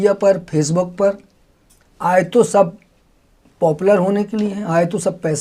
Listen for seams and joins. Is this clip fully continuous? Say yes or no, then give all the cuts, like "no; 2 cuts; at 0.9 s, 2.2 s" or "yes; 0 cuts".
yes; 0 cuts